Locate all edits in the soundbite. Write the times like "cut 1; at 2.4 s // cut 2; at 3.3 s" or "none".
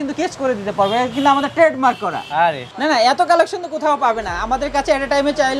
cut 1; at 2.7 s